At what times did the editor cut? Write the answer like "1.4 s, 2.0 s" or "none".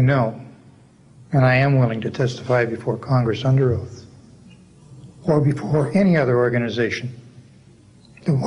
none